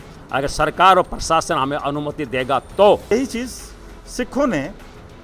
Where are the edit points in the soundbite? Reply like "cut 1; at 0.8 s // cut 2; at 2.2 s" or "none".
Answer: cut 1; at 3.1 s